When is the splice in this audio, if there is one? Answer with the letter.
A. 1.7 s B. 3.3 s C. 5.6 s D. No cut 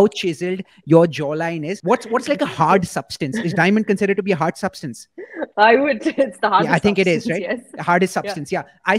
A